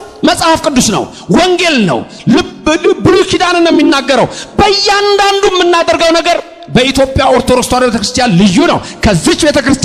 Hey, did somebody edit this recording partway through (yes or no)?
no